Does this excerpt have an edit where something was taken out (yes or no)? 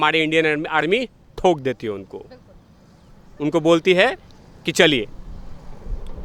no